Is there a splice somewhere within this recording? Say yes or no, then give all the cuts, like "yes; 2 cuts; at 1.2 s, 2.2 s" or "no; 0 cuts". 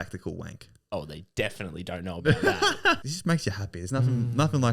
yes; 1 cut; at 3.0 s